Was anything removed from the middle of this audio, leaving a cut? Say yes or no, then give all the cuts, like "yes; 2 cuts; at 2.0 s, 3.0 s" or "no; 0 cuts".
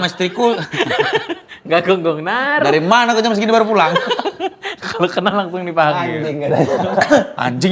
no; 0 cuts